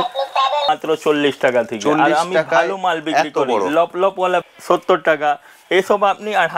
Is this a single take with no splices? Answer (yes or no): no